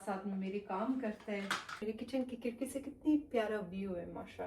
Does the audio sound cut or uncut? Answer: cut